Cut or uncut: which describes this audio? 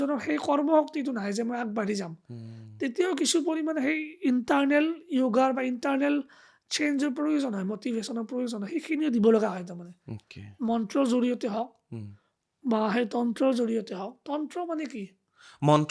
uncut